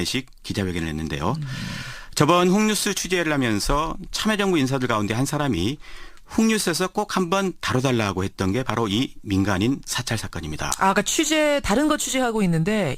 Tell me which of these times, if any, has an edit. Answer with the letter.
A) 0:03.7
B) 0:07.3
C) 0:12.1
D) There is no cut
B